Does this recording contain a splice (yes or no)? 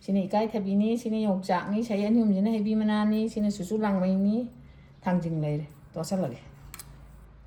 no